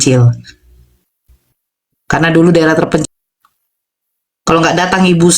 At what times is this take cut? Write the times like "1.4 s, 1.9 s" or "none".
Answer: 3.0 s